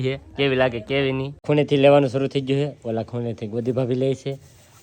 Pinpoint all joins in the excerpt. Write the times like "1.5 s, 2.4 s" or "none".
1.4 s